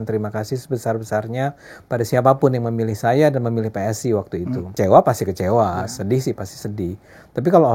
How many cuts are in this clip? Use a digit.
1